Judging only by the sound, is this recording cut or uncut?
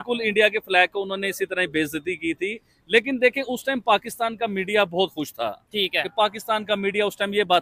uncut